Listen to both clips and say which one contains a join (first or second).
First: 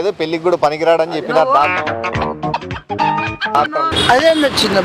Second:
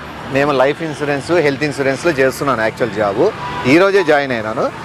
first